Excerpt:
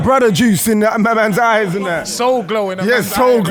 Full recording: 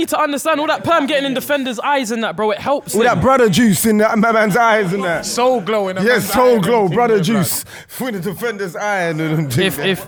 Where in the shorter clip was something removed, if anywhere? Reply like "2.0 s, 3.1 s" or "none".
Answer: none